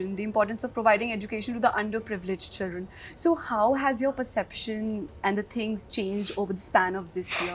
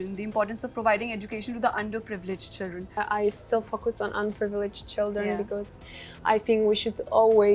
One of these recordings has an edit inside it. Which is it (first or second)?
second